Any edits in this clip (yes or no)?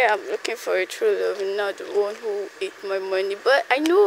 no